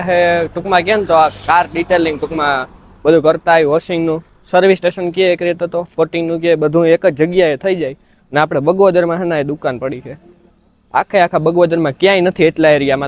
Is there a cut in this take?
no; 0 cuts

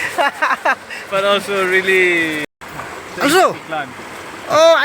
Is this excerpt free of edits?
no; 1 cut; at 2.5 s

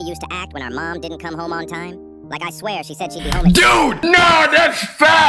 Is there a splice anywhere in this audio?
no; 0 cuts

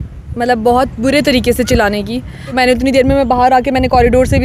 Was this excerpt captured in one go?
no; 1 cut; at 2.5 s

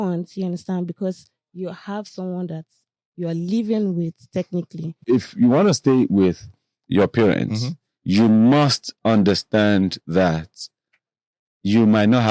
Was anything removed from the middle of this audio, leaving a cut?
yes; 1 cut; at 5.0 s

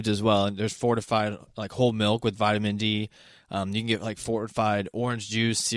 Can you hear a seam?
no; 0 cuts

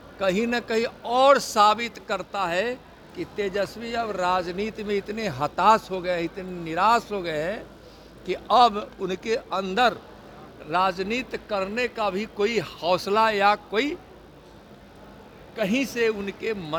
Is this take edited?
no; 0 cuts

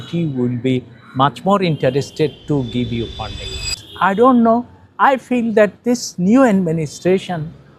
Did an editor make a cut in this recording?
yes; 1 cut; at 3.8 s

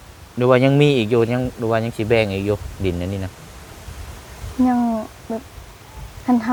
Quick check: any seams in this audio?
no; 0 cuts

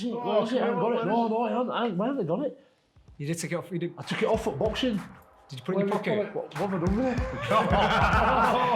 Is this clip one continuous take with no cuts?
yes; 0 cuts

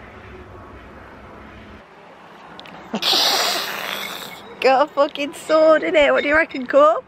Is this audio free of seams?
no; 1 cut; at 1.8 s

